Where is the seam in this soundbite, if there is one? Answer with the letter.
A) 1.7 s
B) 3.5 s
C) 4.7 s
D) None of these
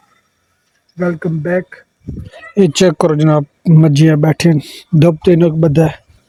D